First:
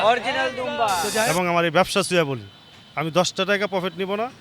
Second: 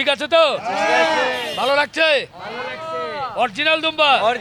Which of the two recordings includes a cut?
first; 1 cut; at 1.2 s

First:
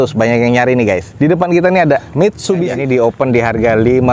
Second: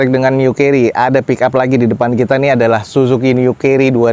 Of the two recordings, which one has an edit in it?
first; 2 cuts; at 1.1 s, 2.8 s

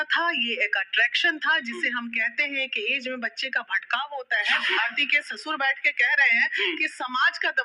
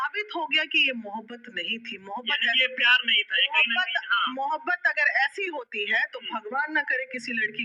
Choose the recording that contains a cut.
first; 1 cut; at 4.8 s

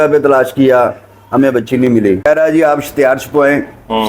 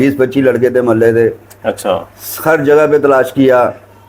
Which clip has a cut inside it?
first; 1 cut; at 2.2 s

